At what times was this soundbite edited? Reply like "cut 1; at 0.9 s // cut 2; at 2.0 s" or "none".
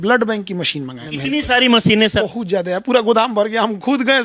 cut 1; at 1.0 s // cut 2; at 2.2 s

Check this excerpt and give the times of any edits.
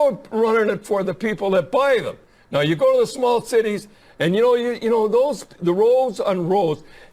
cut 1; at 5.5 s

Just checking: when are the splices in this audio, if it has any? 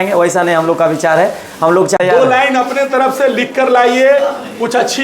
cut 1; at 2.0 s

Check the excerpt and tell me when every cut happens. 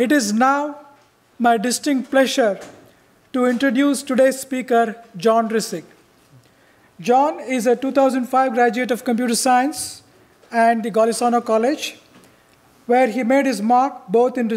cut 1; at 13.3 s

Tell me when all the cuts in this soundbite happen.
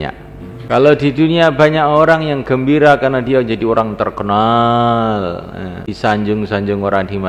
cut 1; at 0.8 s // cut 2; at 6.1 s

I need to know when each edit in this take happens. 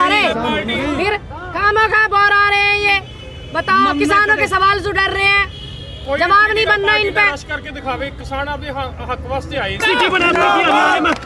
cut 1; at 9.8 s

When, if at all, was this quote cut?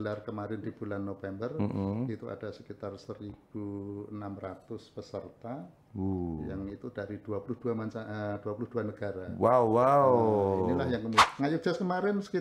cut 1; at 11.2 s

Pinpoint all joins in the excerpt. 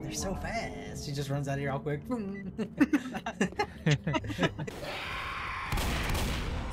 cut 1; at 4.7 s

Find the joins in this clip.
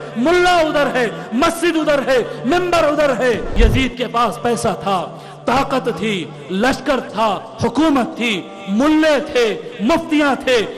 cut 1; at 3.5 s

